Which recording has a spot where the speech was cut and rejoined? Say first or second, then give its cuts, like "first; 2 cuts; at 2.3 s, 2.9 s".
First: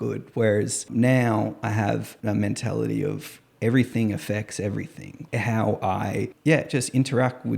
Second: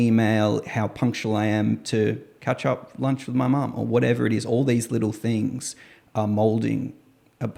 first; 4 cuts; at 0.8 s, 2.1 s, 5.1 s, 6.3 s